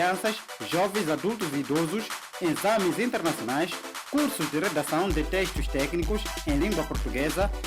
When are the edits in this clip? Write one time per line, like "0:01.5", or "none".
none